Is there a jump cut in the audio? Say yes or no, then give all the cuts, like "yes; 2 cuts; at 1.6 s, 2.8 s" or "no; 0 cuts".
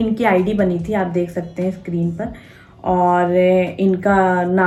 no; 0 cuts